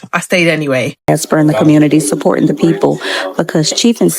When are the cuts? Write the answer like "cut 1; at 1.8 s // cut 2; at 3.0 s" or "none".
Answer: cut 1; at 1.1 s